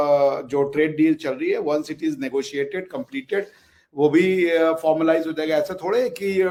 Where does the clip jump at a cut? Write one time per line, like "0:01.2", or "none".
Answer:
none